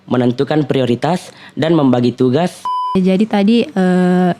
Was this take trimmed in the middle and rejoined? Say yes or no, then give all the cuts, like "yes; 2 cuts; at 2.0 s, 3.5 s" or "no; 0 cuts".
yes; 1 cut; at 2.8 s